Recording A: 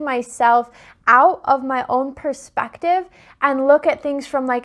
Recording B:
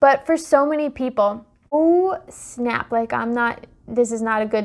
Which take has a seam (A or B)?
B